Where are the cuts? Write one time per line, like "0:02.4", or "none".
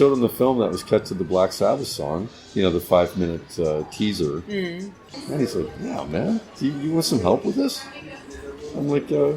0:05.0